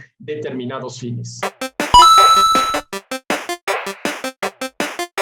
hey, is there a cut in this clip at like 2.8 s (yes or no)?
no